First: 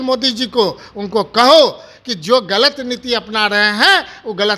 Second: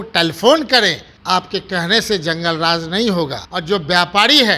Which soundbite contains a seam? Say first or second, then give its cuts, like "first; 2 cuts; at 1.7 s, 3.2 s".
second; 2 cuts; at 1.1 s, 3.5 s